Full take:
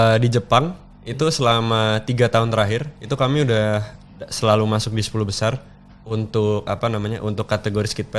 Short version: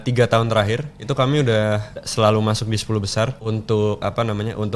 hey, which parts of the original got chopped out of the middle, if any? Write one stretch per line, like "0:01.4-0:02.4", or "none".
0:04.0-0:04.2
0:05.6-0:06.0